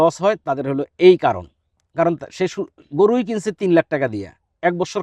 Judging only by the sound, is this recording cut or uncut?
uncut